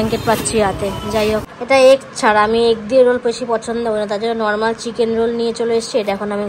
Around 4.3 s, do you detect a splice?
no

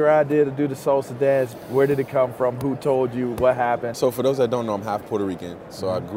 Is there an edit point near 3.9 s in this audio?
yes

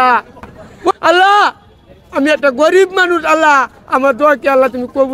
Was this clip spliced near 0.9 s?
yes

